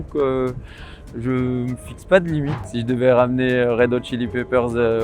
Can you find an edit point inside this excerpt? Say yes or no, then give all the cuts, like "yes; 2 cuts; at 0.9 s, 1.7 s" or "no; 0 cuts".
yes; 1 cut; at 2.6 s